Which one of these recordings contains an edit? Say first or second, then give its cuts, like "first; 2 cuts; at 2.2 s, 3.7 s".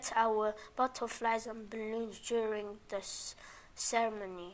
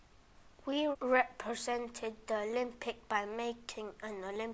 second; 1 cut; at 0.9 s